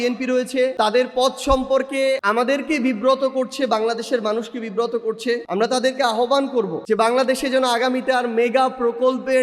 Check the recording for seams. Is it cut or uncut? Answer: cut